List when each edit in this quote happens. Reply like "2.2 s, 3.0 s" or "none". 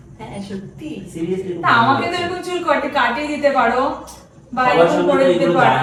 none